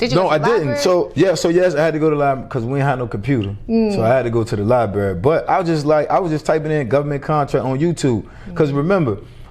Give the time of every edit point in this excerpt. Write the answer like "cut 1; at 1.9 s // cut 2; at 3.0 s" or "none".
cut 1; at 1.1 s